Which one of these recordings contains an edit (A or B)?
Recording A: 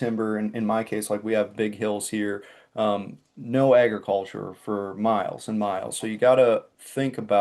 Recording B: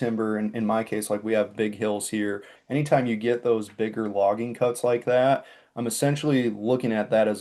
B